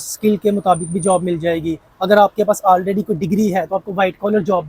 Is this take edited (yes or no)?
no